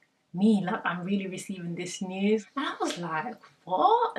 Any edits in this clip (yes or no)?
yes